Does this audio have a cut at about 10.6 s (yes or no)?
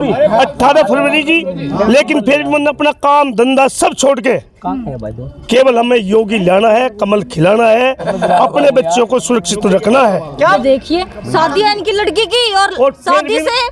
yes